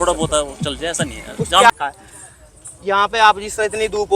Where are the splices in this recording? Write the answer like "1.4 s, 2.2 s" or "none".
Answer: 1.7 s